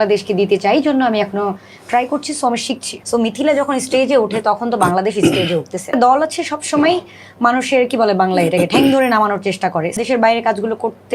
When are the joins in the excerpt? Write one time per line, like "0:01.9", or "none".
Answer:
0:03.0
0:05.9
0:10.0